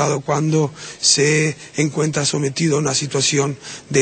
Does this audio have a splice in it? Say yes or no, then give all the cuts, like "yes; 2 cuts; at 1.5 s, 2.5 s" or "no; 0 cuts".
no; 0 cuts